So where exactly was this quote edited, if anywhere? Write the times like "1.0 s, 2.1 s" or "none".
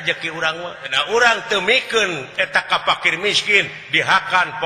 0.9 s

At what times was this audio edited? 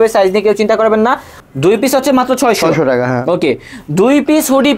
1.4 s

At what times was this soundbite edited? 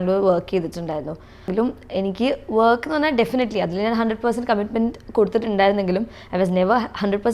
1.5 s

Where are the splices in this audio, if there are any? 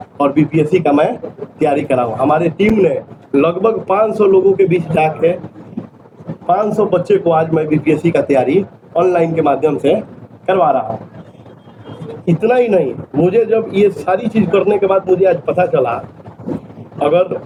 none

